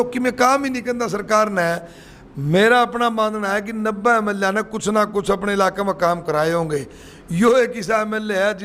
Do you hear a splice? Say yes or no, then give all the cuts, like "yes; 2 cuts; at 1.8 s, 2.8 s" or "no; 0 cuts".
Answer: no; 0 cuts